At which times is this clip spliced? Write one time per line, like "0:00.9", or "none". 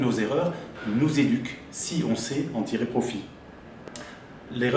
none